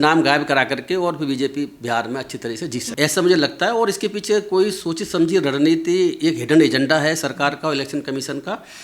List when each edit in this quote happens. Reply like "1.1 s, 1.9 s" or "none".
2.9 s